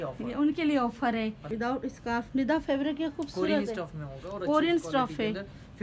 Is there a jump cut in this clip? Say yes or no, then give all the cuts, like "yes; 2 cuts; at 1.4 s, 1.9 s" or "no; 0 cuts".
yes; 1 cut; at 1.4 s